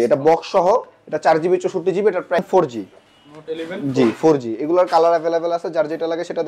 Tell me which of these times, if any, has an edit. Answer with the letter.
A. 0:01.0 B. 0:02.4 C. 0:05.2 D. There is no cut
B